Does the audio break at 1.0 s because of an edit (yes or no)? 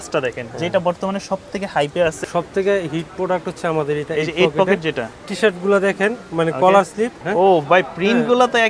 no